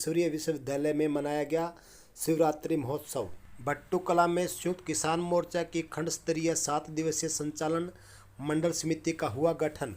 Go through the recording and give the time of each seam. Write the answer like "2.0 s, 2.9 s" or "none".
3.4 s